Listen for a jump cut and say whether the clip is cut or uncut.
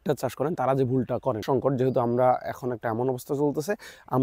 cut